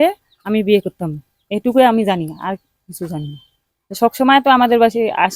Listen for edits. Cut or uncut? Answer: uncut